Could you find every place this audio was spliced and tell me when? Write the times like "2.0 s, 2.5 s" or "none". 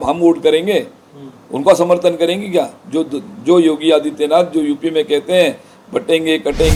none